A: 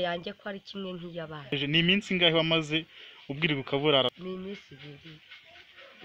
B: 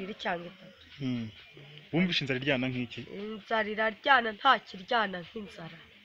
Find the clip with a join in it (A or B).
A